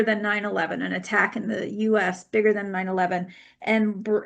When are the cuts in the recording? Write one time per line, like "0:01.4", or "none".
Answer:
none